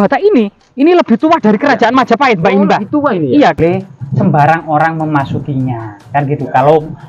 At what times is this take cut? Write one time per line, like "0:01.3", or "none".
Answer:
0:03.6